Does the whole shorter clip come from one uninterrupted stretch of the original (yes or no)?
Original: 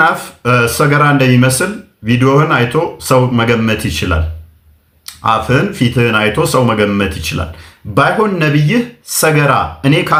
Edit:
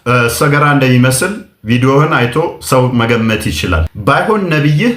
no